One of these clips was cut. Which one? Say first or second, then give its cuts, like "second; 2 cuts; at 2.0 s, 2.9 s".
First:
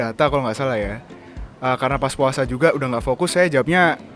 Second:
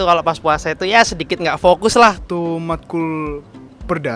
second; 1 cut; at 2.2 s